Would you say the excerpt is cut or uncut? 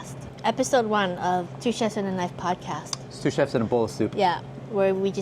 cut